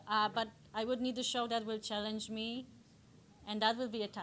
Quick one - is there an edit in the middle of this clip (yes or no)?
no